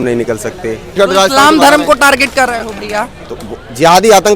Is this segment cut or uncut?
cut